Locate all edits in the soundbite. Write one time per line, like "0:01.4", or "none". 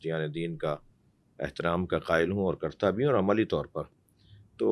none